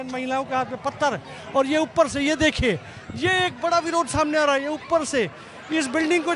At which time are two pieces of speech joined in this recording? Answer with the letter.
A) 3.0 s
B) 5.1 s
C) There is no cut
C